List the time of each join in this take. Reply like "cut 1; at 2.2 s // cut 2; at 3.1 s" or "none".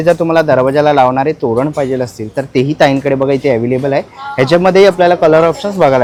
none